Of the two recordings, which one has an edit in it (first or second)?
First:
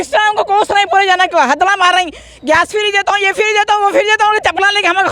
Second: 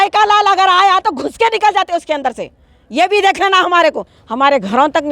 second